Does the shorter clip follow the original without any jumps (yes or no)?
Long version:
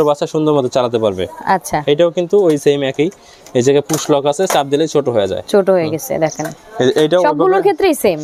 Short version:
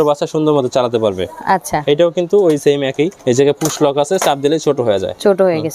no